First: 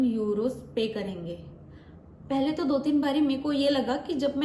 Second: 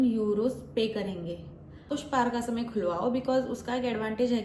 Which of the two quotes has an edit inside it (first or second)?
second